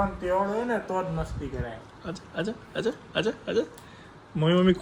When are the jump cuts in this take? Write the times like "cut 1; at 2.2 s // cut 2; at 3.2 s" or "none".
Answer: none